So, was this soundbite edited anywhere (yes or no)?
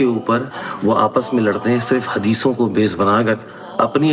no